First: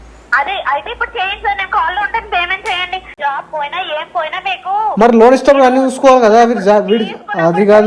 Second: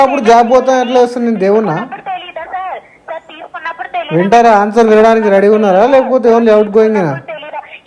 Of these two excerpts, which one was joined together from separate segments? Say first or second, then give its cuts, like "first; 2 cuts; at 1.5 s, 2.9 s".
first; 1 cut; at 3.1 s